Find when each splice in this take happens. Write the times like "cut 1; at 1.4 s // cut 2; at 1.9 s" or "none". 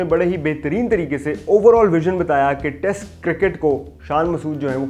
none